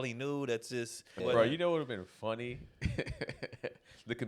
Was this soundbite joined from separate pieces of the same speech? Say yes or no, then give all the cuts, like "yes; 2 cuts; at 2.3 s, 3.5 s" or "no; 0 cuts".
yes; 1 cut; at 1.1 s